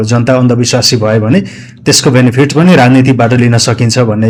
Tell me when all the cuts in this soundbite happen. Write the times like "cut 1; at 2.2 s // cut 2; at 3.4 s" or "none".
none